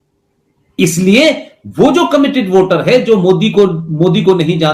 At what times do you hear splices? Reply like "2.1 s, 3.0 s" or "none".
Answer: none